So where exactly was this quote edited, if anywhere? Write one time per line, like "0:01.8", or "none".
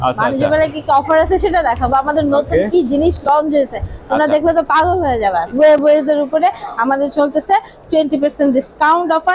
0:05.5